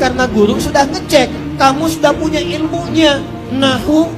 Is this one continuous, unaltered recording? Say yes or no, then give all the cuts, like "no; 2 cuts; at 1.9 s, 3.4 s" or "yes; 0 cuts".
yes; 0 cuts